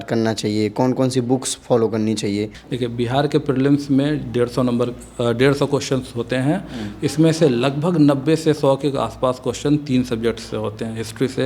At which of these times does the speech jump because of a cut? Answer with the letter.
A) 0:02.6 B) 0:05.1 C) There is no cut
A